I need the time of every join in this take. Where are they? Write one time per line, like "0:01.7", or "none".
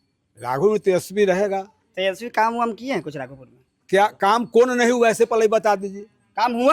none